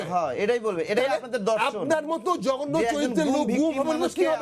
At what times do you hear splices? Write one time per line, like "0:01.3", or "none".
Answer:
none